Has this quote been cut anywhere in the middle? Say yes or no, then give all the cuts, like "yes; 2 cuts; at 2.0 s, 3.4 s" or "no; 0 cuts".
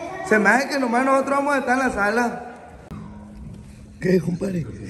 yes; 1 cut; at 3.1 s